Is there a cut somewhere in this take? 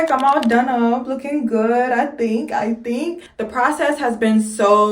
yes; 1 cut; at 3.3 s

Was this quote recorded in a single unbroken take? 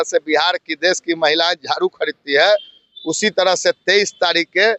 yes; 0 cuts

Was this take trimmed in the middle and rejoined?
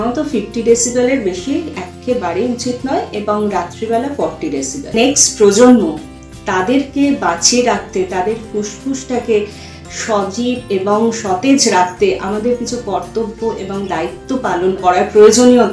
yes; 2 cuts; at 5.0 s, 14.8 s

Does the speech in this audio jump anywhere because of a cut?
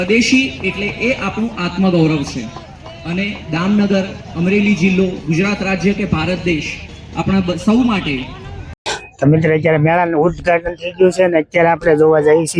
no; 0 cuts

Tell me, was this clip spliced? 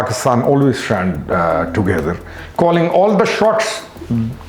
yes; 1 cut; at 2.4 s

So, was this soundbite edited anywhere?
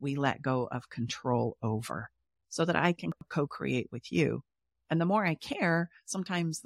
yes; 1 cut; at 3.2 s

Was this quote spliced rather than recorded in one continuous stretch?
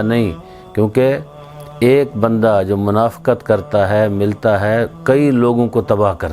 no; 0 cuts

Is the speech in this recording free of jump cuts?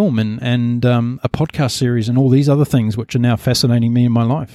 yes; 0 cuts

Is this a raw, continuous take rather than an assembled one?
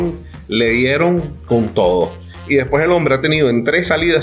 no; 1 cut; at 2.2 s

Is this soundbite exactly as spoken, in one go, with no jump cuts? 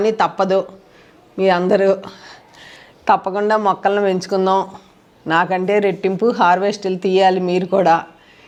yes; 0 cuts

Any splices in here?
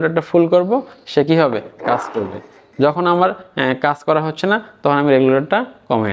no; 0 cuts

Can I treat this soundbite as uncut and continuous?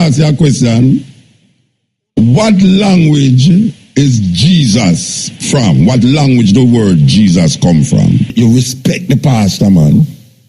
no; 1 cut; at 8.3 s

